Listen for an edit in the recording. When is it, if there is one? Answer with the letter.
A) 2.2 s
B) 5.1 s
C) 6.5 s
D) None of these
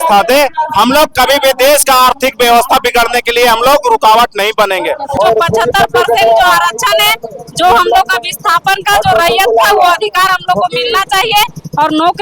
B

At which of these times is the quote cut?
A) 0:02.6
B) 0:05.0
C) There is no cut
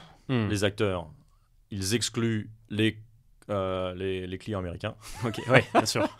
A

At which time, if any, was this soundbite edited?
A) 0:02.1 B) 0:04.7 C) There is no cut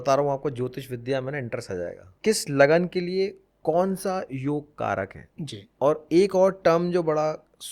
A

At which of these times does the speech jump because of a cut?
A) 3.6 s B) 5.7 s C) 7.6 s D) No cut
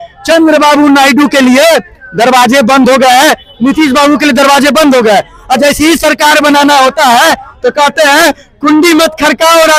D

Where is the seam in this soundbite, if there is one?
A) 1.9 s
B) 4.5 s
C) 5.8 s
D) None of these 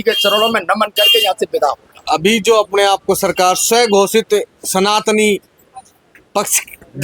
D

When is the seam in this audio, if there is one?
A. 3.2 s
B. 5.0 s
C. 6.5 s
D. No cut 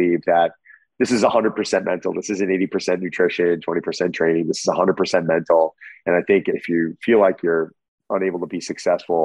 C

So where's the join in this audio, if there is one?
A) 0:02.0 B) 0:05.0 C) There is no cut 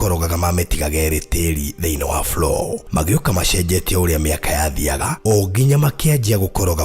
B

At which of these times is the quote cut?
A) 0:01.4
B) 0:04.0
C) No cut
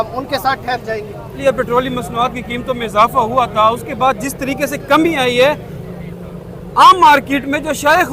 A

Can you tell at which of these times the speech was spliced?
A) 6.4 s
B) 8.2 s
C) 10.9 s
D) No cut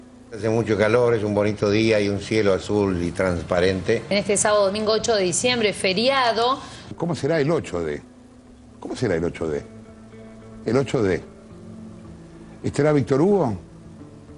D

